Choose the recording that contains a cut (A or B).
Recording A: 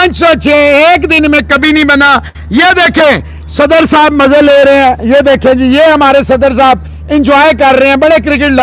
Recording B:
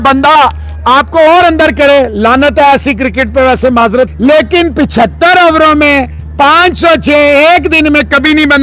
B